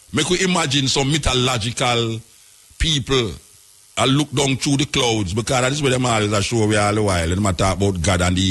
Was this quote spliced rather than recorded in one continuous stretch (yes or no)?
no